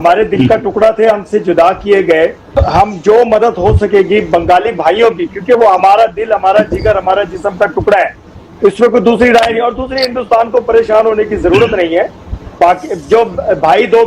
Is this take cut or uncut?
cut